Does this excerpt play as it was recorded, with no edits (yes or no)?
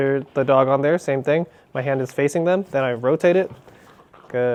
yes